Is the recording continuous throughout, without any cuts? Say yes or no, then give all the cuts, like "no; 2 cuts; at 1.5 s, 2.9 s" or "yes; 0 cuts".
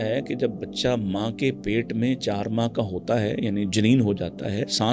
yes; 0 cuts